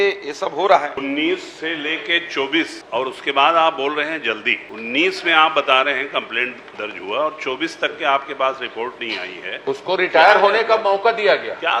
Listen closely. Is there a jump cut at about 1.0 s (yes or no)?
yes